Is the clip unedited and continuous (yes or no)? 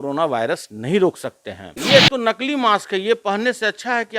no